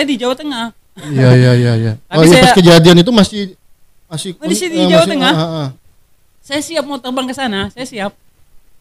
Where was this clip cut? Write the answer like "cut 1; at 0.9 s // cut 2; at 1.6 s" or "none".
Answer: none